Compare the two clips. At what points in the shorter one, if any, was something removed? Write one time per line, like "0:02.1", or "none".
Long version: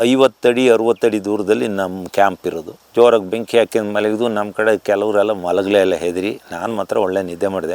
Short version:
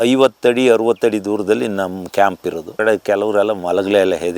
0:02.7

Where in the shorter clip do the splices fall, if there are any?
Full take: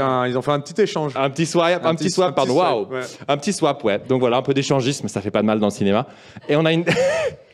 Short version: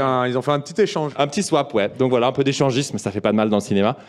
0:01.1

